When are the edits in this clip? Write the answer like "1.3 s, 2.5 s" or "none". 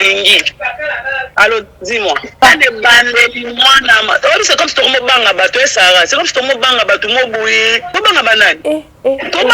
1.3 s, 2.4 s, 7.9 s, 8.6 s